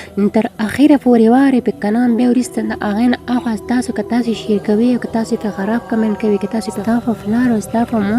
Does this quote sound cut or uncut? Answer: cut